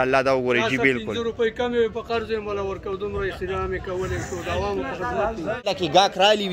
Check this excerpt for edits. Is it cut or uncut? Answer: cut